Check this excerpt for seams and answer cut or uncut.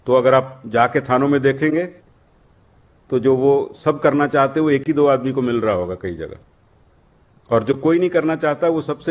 uncut